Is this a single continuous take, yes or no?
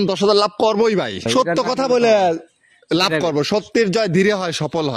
no